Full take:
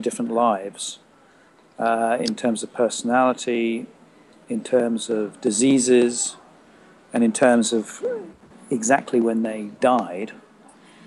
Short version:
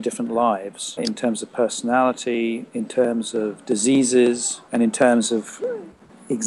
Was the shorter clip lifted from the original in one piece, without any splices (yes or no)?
no